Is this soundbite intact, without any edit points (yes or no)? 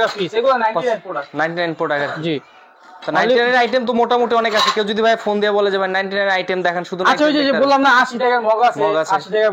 yes